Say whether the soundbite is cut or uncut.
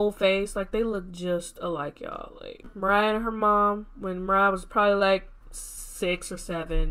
cut